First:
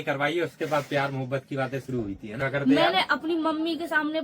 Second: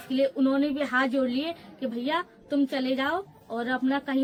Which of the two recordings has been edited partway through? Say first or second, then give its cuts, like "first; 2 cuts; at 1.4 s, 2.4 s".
first; 1 cut; at 2.3 s